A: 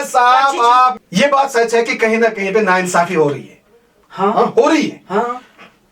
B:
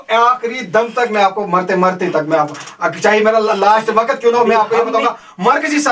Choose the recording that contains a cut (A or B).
A